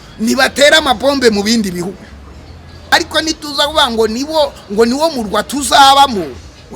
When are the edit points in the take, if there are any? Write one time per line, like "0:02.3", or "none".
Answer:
0:02.9

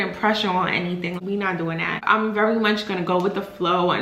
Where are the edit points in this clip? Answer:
0:01.2

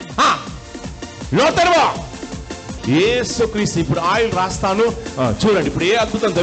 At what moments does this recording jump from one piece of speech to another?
0:02.7

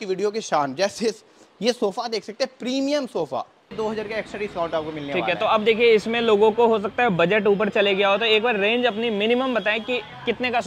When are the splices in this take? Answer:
0:03.7

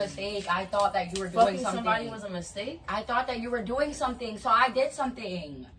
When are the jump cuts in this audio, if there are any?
none

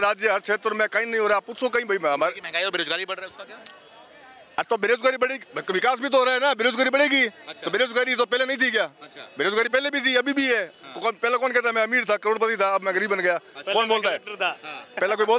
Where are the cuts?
none

